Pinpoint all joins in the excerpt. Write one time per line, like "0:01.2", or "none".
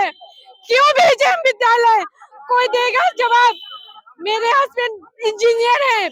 none